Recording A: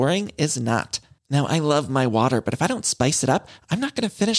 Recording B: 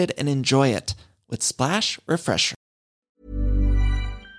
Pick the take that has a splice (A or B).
B